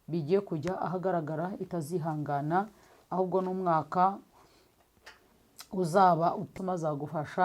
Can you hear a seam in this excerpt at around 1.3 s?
no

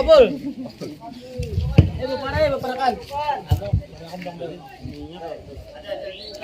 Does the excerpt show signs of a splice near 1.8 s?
no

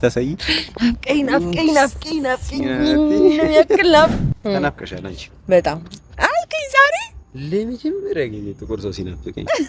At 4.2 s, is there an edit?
yes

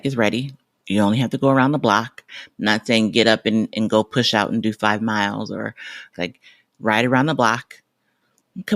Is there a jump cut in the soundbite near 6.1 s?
yes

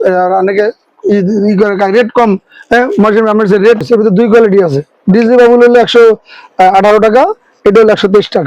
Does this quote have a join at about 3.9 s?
yes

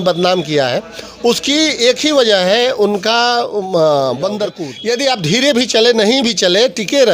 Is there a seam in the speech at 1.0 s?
no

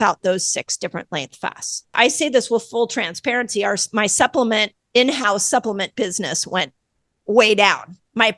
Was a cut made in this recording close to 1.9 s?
yes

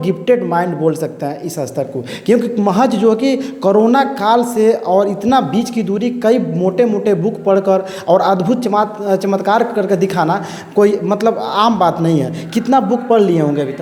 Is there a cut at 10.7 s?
no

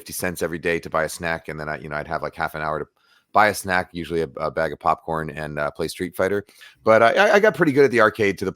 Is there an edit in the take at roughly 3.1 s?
no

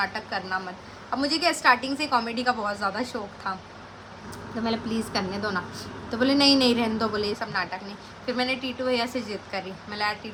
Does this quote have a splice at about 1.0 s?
no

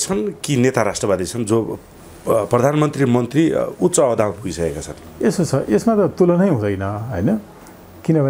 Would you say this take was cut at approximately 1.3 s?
no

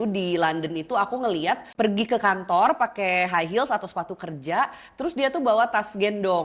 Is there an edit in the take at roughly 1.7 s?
yes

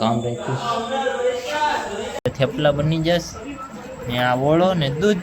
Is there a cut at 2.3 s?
yes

